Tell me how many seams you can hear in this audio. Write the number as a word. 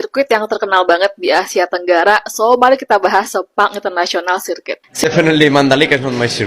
one